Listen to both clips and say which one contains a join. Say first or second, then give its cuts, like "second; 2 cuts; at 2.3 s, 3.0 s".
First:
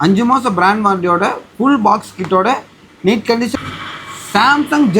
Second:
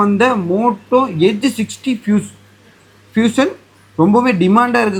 first; 1 cut; at 3.5 s